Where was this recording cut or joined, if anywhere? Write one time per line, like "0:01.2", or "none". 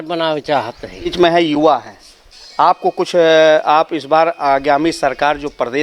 0:01.1